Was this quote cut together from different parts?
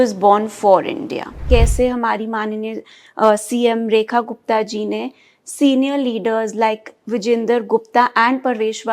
yes; 1 cut; at 1.4 s

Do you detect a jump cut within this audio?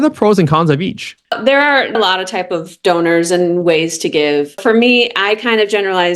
yes; 2 cuts; at 1.4 s, 4.6 s

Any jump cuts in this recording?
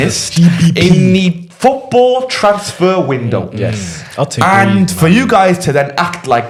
no; 0 cuts

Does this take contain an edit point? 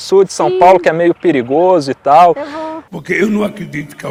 no; 0 cuts

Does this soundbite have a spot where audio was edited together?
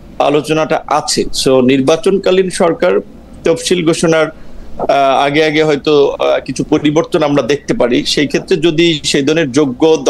no; 0 cuts

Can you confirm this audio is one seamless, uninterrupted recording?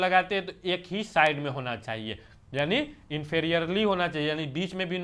yes; 0 cuts

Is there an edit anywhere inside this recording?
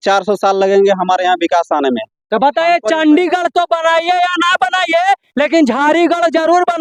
no; 0 cuts

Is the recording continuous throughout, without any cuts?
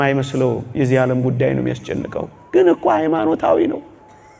yes; 0 cuts

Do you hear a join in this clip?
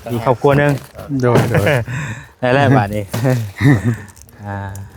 no; 0 cuts

